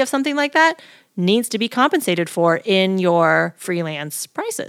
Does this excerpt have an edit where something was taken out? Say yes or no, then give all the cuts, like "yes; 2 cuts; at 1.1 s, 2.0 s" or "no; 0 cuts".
yes; 1 cut; at 3.6 s